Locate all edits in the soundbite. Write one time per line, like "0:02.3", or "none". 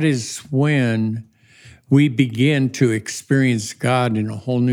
none